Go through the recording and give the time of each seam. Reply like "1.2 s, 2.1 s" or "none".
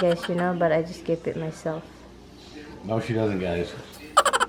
none